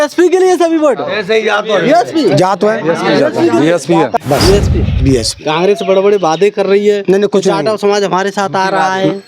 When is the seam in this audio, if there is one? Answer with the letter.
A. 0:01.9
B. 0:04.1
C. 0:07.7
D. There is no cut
B